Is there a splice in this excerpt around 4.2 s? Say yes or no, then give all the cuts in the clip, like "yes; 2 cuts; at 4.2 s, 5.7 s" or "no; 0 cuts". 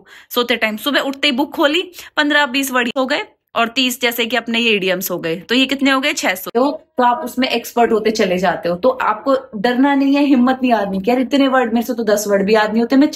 no; 2 cuts; at 2.9 s, 6.5 s